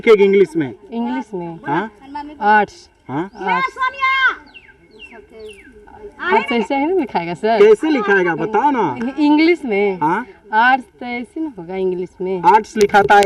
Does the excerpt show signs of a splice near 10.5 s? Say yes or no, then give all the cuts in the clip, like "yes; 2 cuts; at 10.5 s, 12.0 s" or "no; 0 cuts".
no; 0 cuts